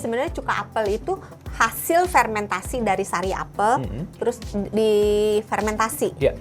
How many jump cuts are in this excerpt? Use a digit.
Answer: 1